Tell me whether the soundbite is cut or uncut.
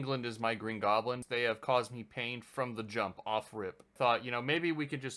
cut